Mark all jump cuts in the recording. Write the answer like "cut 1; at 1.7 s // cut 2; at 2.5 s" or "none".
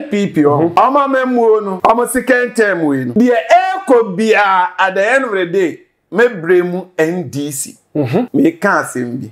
cut 1; at 0.7 s // cut 2; at 1.7 s // cut 3; at 3.1 s // cut 4; at 8.3 s